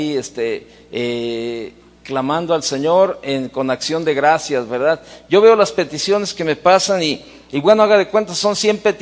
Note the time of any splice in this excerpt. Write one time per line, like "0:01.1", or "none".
0:06.0